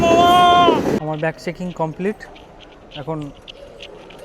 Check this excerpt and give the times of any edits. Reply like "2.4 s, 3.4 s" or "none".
1.0 s